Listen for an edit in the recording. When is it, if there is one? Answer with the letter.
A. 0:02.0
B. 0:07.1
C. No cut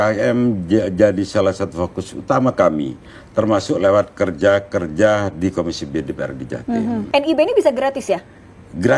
B